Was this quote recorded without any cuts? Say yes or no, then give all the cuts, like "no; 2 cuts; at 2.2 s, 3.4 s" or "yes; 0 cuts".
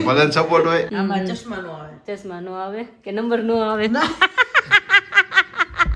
no; 1 cut; at 0.9 s